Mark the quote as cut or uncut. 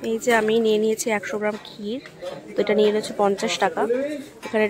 uncut